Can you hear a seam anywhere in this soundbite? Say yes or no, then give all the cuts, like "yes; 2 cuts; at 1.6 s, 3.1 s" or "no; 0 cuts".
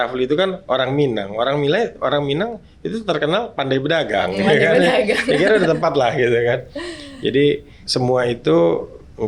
yes; 1 cut; at 7.7 s